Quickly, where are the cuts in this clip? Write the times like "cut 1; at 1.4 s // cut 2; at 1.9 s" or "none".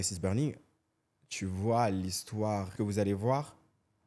cut 1; at 2.7 s

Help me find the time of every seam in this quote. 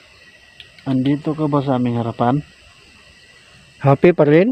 none

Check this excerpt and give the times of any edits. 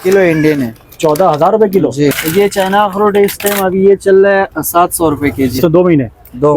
cut 1; at 2.2 s // cut 2; at 5.6 s

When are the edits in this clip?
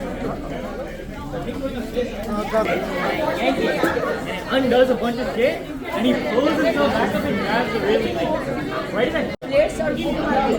cut 1; at 9.5 s

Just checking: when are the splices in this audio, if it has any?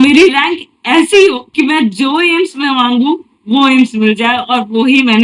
cut 1; at 1.4 s

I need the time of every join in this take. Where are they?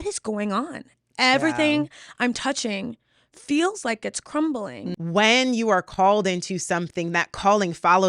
cut 1; at 4.9 s

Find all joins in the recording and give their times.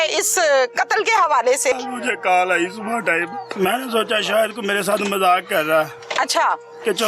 cut 1; at 1.7 s // cut 2; at 3.5 s

